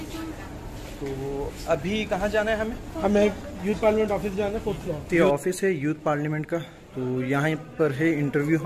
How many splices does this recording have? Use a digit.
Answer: 1